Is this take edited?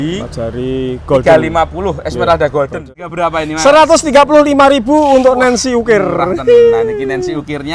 yes; 1 cut; at 3.1 s

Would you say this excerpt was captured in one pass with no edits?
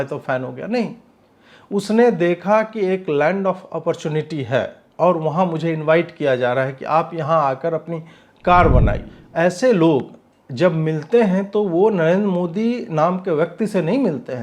no; 1 cut; at 9.1 s

